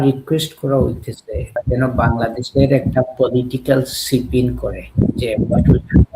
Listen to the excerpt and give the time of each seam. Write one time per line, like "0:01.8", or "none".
0:01.6
0:04.8